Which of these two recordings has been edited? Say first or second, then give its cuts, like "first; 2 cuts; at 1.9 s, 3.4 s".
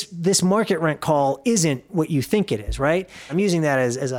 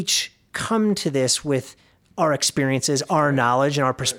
first; 1 cut; at 3.2 s